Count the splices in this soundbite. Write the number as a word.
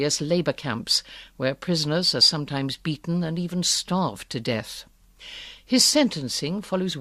zero